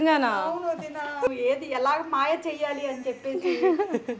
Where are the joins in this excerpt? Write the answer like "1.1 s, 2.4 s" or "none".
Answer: 1.3 s